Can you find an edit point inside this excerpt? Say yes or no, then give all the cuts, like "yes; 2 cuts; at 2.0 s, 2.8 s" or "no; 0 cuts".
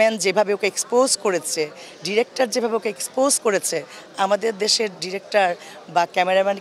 no; 0 cuts